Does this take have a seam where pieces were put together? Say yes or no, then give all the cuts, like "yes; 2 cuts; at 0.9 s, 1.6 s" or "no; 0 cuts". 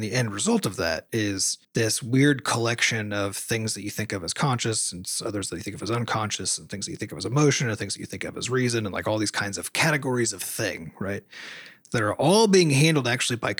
no; 0 cuts